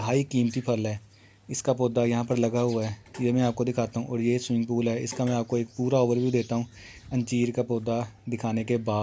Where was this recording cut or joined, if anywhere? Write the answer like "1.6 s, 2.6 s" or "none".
none